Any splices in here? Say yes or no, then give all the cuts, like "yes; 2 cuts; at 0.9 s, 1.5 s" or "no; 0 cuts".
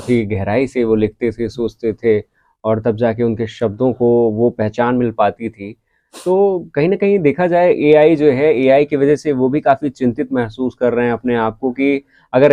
no; 0 cuts